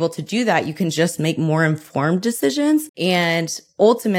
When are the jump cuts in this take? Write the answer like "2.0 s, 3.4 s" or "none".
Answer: 2.9 s